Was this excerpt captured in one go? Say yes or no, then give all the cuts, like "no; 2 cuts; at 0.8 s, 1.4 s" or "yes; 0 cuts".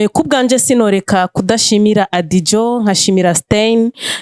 yes; 0 cuts